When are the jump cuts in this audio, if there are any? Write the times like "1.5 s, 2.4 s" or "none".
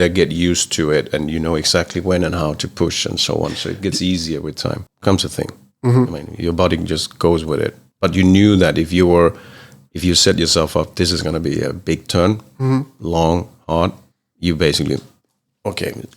4.9 s